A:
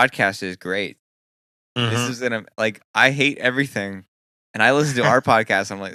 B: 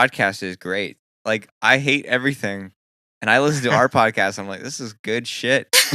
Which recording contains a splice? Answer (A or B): B